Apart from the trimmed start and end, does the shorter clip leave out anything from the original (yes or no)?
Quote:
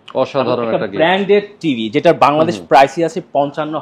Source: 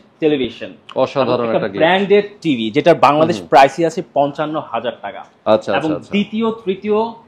no